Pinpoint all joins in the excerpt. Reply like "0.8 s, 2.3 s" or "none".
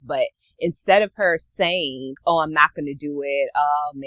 2.2 s